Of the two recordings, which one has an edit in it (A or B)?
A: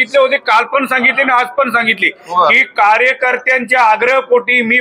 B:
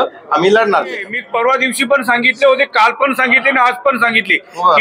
B